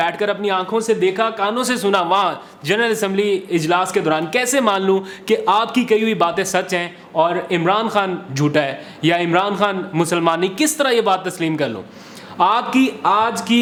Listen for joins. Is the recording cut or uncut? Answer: uncut